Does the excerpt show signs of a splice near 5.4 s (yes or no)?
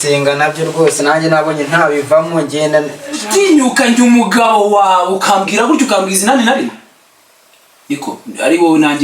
no